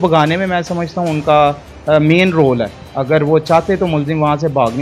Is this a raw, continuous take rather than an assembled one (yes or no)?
yes